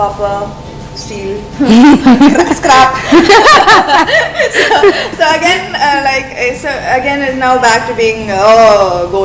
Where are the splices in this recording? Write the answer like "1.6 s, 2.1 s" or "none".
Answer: none